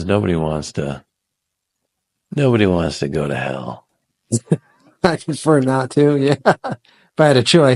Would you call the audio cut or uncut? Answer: uncut